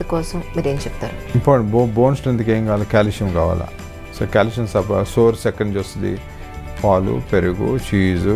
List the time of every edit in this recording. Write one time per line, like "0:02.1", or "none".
0:01.4